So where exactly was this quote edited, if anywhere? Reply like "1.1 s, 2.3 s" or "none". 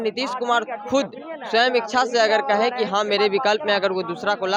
none